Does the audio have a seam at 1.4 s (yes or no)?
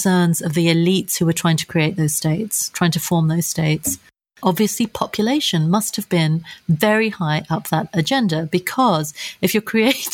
no